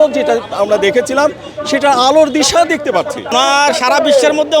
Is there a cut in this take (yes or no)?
yes